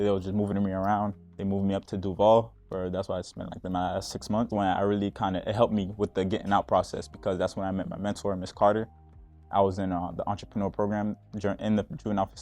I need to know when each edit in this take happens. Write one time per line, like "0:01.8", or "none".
0:04.5